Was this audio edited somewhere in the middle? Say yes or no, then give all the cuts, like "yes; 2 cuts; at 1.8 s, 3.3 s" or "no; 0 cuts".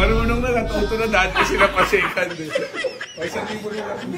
no; 0 cuts